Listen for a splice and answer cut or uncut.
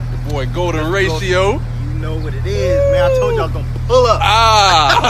uncut